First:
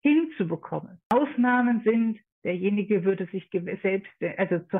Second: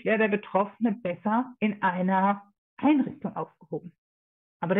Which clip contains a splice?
first; 1 cut; at 1.1 s

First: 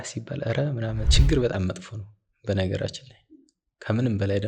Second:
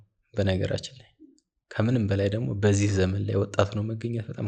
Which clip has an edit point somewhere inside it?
first; 1 cut; at 1.1 s

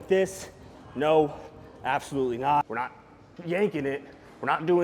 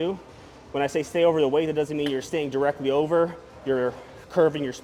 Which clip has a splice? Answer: first; 1 cut; at 2.6 s

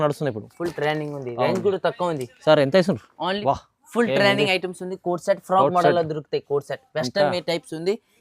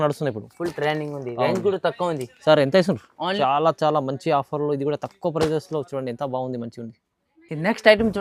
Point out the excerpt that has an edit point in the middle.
first; 1 cut; at 3.3 s

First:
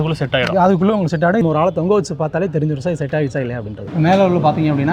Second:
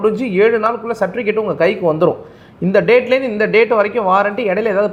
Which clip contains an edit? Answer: first; 2 cuts; at 1.4 s, 3.8 s

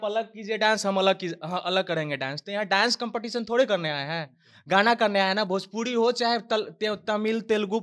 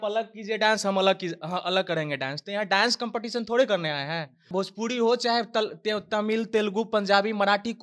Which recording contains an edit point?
second; 1 cut; at 4.5 s

